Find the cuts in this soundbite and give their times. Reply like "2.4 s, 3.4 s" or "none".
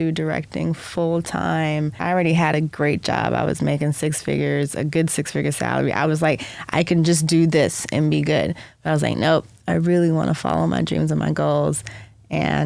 2.0 s